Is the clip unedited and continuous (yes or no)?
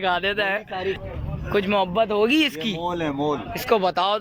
no